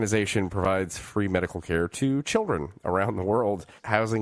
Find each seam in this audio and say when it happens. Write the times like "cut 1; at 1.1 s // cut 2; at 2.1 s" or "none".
none